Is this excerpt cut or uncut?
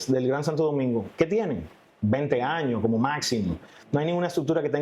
uncut